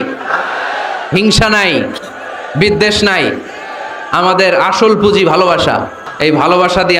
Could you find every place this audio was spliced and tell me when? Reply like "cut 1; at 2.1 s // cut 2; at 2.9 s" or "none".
cut 1; at 6.0 s